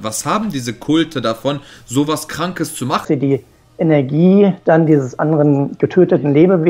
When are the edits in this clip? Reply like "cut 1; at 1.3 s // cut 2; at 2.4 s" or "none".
cut 1; at 3.0 s